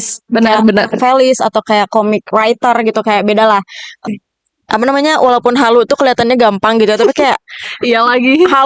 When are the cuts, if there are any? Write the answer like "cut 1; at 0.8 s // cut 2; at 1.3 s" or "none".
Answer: cut 1; at 3.8 s